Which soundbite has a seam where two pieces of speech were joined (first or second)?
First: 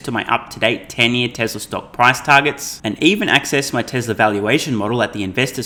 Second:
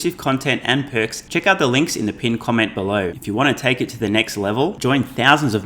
second